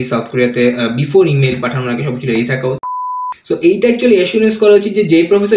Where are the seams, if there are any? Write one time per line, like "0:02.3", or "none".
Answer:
0:02.9